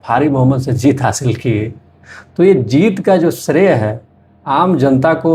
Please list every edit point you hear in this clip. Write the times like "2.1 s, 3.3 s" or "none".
none